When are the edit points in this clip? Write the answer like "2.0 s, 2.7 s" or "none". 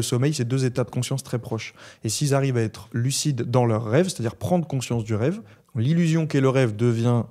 none